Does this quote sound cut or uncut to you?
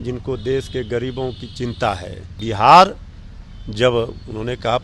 cut